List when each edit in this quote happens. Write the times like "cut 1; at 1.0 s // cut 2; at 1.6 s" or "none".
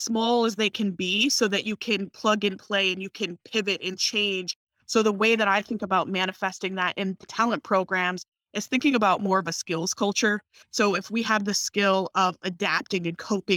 cut 1; at 4.6 s // cut 2; at 7.3 s // cut 3; at 10.5 s

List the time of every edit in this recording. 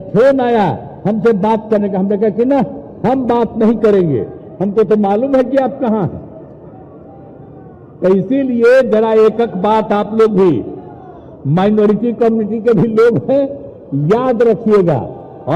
none

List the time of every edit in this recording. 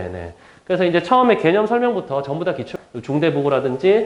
cut 1; at 2.8 s

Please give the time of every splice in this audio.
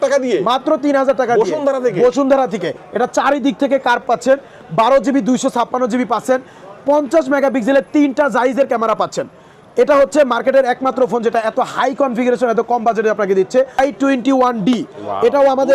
cut 1; at 2.7 s // cut 2; at 13.8 s

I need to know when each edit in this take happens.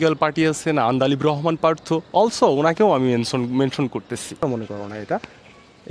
cut 1; at 4.4 s

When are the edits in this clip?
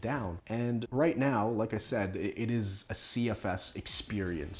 none

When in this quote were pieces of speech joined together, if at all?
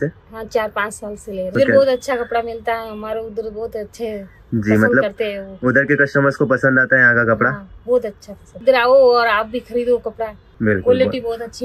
cut 1; at 1.5 s // cut 2; at 8.6 s // cut 3; at 10.4 s

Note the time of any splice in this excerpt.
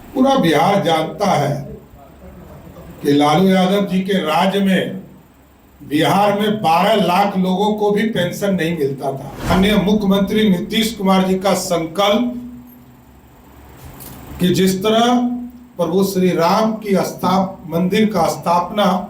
cut 1; at 9.5 s

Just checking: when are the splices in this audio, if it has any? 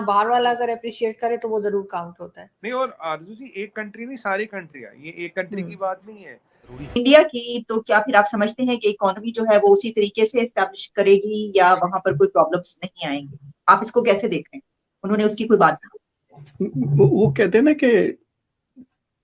cut 1; at 6.7 s

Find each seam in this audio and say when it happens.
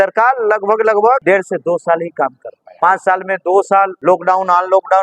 cut 1; at 1.2 s // cut 2; at 2.6 s // cut 3; at 3.9 s

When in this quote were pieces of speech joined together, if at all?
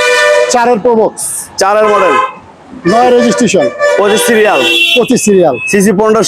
none

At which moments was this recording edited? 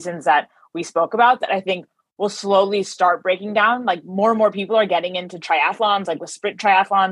none

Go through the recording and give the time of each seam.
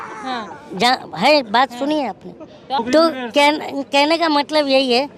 cut 1; at 2.8 s

